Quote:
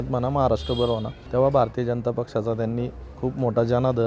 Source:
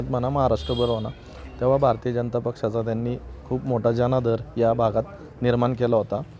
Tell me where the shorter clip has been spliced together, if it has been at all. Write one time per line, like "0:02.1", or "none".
0:01.2